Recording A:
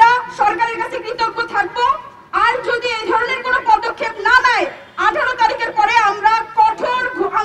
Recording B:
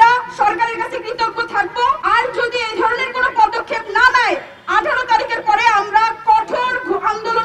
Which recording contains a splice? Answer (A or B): B